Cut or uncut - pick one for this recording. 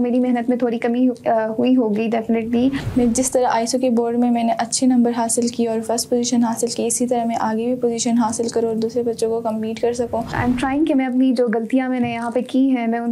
cut